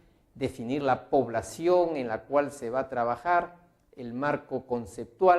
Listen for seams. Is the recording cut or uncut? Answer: cut